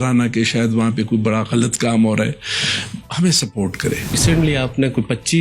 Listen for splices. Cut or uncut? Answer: cut